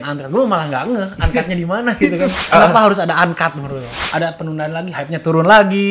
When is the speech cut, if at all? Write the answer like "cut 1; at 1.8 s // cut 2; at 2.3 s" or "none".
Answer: cut 1; at 2.4 s // cut 2; at 4.0 s